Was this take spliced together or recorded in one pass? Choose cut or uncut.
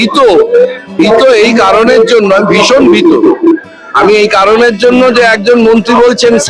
uncut